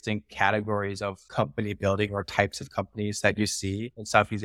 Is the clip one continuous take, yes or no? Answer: yes